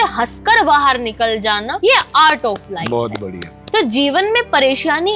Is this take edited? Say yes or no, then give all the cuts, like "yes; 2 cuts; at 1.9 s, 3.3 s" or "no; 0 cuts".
yes; 1 cut; at 1.7 s